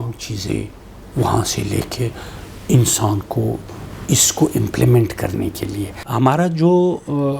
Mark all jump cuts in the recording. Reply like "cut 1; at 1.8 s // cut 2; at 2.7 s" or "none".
cut 1; at 6.0 s